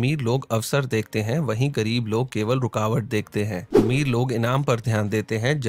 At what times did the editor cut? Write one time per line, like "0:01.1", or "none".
0:03.7